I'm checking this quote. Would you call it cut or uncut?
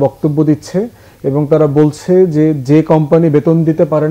uncut